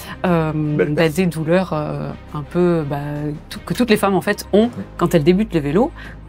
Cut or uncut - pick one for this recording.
uncut